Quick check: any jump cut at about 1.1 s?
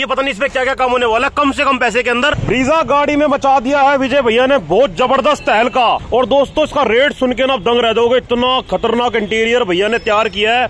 no; 2 cuts; at 2.4 s, 6.0 s

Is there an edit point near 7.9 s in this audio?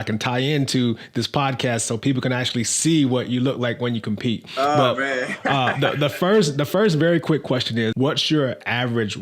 yes; 1 cut; at 7.9 s

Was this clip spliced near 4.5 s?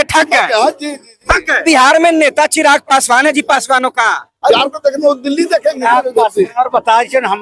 yes; 3 cuts; at 1.6 s, 4.5 s, 5.8 s

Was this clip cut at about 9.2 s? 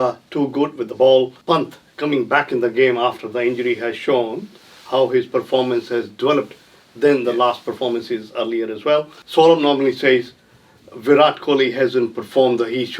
yes; 2 cuts; at 1.4 s, 9.2 s

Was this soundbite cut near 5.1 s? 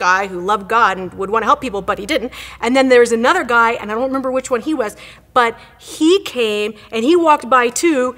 yes; 2 cuts; at 2.4 s, 5.1 s

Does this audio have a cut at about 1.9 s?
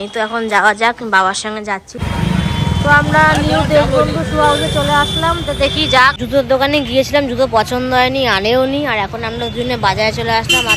yes; 2 cuts; at 1.9 s, 6.2 s

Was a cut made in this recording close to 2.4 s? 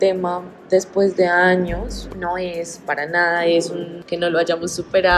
no; 0 cuts

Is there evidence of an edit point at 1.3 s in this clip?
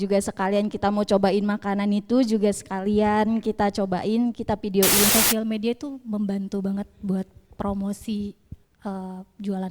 no; 1 cut; at 5.1 s

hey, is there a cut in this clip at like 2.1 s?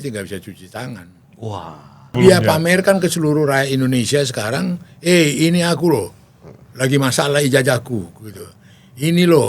yes; 1 cut; at 2.1 s

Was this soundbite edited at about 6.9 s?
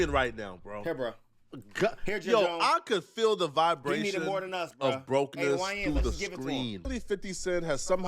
yes; 1 cut; at 6.9 s

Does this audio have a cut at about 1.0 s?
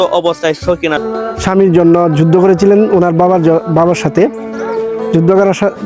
yes; 1 cut; at 1.0 s

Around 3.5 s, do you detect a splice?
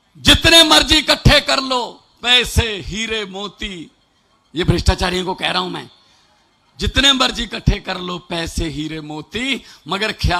no; 0 cuts

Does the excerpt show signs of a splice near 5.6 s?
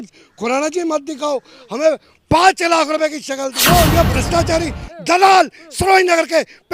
no; 1 cut; at 3.6 s

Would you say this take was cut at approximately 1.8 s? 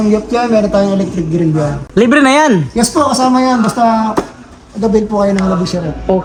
no; 0 cuts

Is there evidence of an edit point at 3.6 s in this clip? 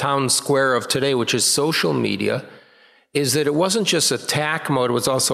no; 0 cuts

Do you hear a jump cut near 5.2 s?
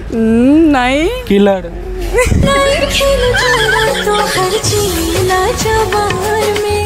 no; 1 cut; at 2.4 s

